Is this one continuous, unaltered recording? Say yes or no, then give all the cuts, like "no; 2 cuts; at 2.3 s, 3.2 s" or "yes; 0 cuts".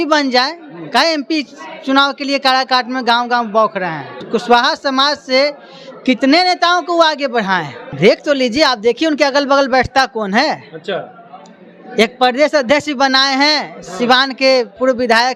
no; 2 cuts; at 4.1 s, 7.8 s